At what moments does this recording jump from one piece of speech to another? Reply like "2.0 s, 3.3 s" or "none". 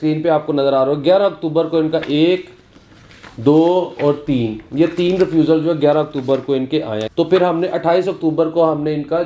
7.0 s